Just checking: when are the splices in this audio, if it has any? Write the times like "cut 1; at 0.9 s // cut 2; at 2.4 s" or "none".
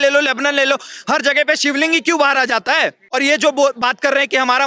cut 1; at 3.0 s